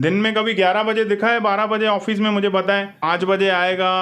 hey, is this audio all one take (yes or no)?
no